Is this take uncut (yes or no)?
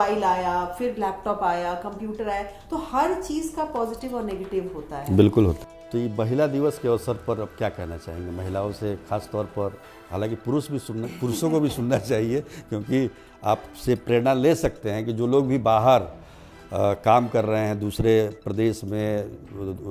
no